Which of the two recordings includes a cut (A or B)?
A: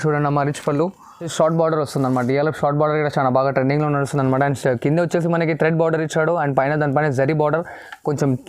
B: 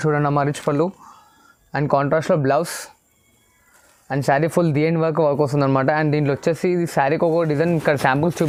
A